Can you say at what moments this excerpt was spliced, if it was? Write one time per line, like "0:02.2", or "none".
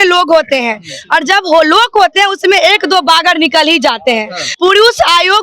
0:04.4

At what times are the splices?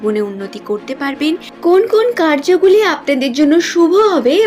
0:01.6

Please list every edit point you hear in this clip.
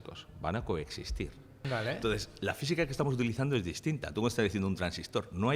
0:01.6

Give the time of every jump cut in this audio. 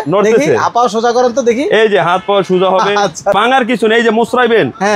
0:03.4

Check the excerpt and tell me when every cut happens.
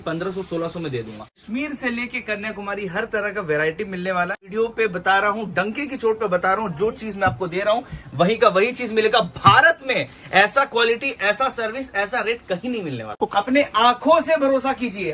0:01.4
0:04.4
0:13.1

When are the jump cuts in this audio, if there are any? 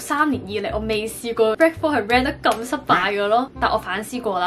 0:03.5

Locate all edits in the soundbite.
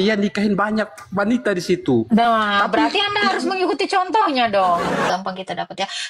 0:05.1

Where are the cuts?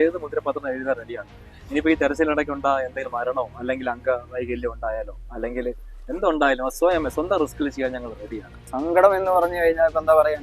0:08.6

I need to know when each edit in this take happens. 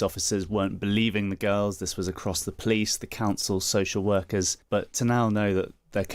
0:04.6

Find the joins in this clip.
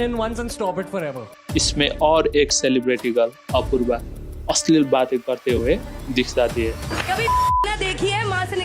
0:01.3
0:06.8

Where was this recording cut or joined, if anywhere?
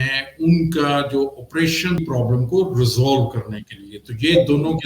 0:02.0

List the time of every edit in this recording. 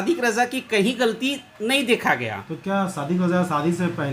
none

